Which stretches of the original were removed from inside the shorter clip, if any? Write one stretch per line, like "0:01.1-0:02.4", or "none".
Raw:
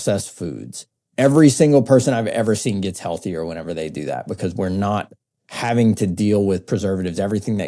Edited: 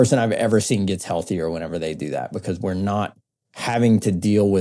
none